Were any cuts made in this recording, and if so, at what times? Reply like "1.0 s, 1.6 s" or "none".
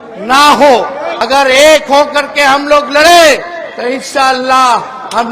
1.1 s